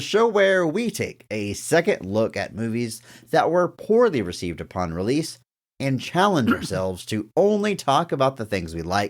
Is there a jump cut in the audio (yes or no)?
no